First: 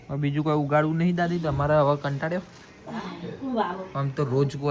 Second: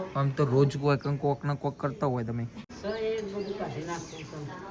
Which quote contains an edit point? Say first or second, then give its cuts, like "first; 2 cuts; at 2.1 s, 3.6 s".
second; 1 cut; at 2.6 s